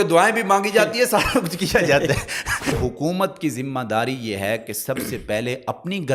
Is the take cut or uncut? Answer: cut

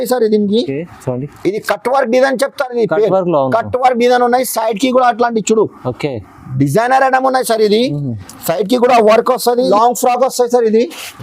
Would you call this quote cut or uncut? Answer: cut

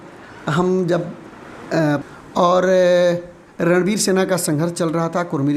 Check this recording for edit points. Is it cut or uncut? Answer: cut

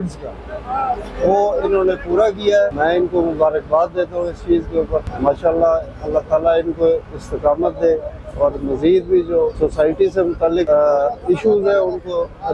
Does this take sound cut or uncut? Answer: cut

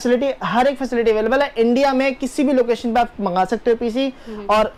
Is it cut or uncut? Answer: uncut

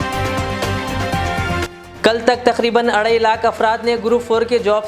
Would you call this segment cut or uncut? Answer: cut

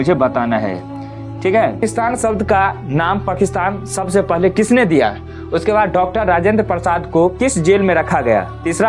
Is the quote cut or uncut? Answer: cut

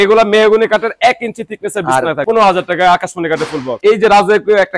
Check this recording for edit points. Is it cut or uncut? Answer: cut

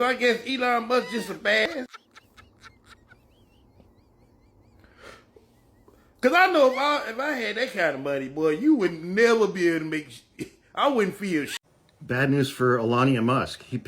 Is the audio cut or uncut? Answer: cut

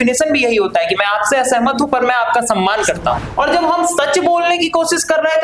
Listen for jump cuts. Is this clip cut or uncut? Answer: cut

